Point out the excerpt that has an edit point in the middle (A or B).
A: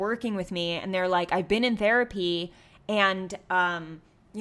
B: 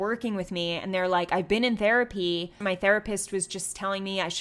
B